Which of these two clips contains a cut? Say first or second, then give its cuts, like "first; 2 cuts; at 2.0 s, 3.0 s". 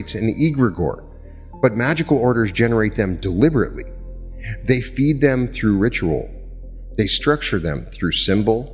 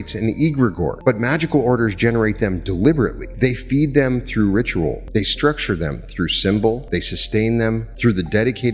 second; 5 cuts; at 1.0 s, 3.2 s, 5.0 s, 6.8 s, 7.9 s